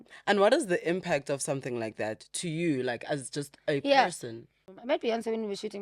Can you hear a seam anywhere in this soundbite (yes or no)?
yes